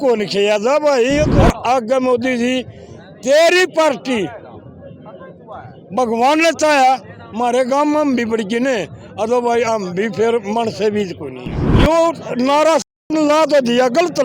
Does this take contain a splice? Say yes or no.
yes